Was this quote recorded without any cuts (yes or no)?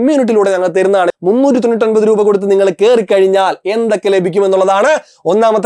no